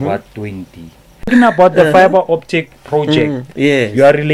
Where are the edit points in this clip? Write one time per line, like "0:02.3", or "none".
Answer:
0:01.3

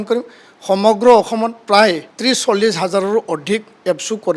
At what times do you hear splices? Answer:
0:02.1

